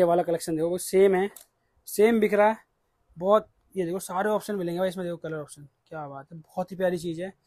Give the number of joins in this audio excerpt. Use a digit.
0